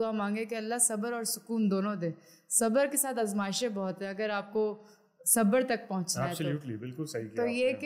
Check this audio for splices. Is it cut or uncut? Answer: uncut